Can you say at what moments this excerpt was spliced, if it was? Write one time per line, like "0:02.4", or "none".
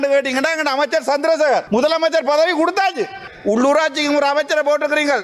0:01.7
0:03.3